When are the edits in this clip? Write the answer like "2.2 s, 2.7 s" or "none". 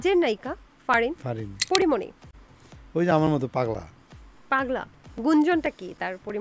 1.7 s